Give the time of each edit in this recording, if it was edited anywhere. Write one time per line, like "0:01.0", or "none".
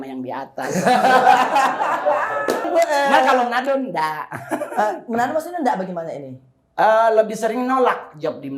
0:02.7